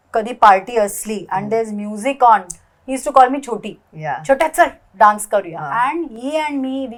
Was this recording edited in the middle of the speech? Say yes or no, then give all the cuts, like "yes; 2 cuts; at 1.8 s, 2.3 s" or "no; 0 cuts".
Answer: no; 0 cuts